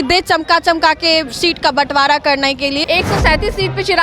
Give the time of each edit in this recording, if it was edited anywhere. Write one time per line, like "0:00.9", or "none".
0:02.8